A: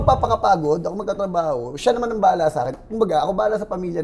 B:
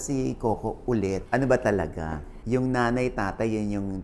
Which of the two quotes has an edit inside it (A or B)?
B